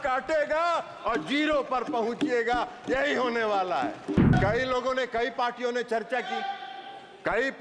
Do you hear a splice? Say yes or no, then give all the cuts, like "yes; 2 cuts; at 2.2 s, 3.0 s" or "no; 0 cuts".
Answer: yes; 1 cut; at 4.3 s